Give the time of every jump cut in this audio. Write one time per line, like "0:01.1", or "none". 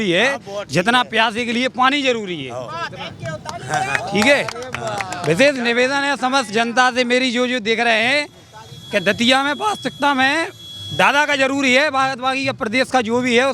none